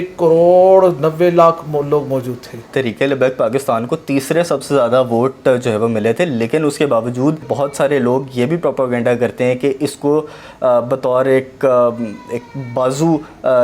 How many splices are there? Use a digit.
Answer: 2